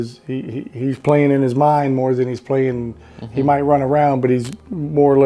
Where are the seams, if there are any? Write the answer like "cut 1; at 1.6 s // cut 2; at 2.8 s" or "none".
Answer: none